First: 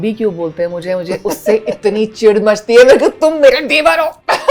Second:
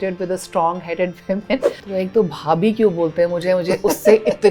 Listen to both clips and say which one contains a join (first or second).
second